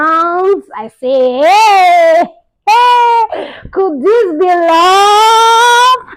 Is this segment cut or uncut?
uncut